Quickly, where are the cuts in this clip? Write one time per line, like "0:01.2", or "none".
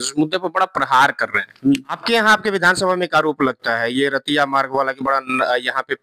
0:01.9